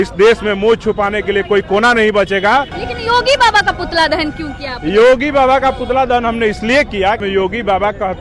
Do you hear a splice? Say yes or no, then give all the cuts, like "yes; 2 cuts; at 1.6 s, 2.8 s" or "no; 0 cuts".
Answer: yes; 2 cuts; at 2.8 s, 7.2 s